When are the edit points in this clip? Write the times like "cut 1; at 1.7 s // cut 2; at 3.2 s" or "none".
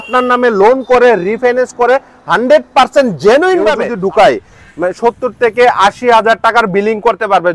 cut 1; at 3.9 s